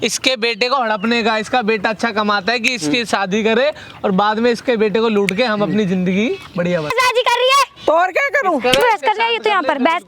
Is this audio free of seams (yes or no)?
no